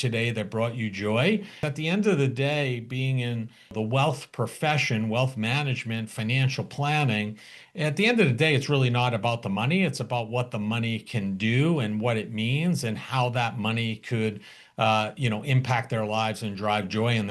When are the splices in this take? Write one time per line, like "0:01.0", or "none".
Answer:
0:01.6
0:03.7